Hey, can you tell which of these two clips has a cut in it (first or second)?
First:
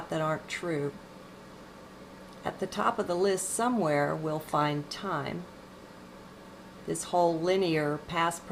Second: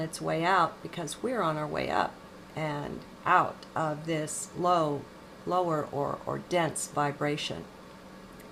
first